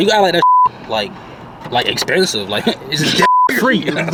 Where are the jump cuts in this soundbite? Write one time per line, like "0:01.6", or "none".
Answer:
none